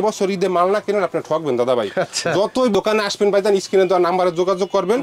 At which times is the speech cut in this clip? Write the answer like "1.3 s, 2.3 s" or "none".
2.7 s